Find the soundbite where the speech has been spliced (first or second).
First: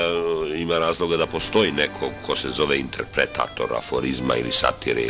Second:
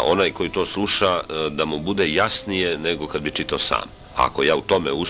second